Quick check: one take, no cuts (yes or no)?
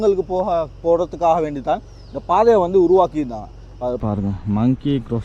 no